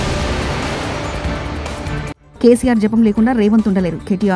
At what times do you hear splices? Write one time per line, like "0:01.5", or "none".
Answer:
0:02.2